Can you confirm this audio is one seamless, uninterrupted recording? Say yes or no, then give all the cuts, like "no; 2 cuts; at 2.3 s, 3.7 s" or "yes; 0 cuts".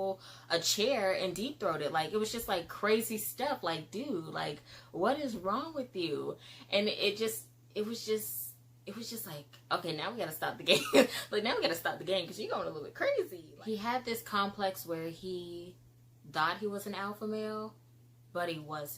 no; 1 cut; at 13.4 s